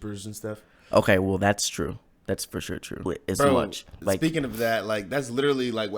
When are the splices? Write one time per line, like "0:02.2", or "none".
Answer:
0:03.1